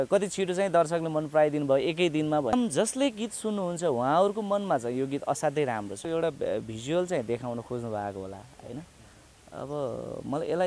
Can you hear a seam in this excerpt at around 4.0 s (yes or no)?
no